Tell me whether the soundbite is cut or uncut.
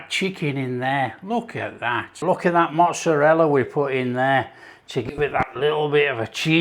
cut